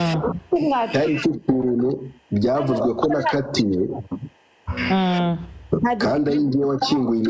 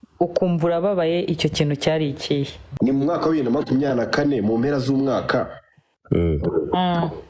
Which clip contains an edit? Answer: second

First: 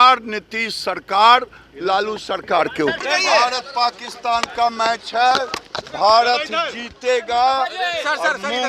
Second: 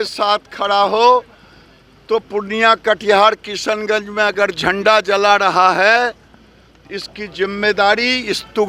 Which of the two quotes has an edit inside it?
first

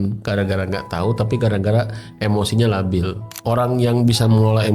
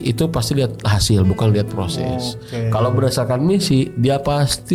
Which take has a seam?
first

